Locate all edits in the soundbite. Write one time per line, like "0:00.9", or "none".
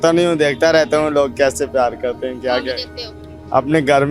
none